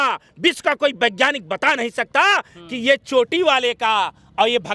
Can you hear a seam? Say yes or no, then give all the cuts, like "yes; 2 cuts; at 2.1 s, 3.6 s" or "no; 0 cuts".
no; 0 cuts